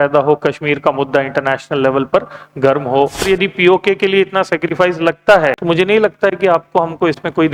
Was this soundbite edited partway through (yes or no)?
yes